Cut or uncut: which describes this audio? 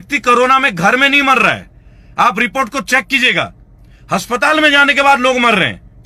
uncut